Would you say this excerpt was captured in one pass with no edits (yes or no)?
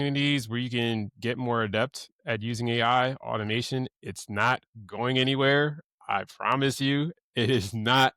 yes